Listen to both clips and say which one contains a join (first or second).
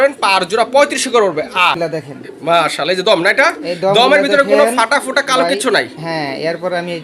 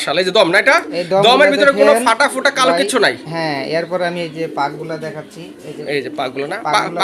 first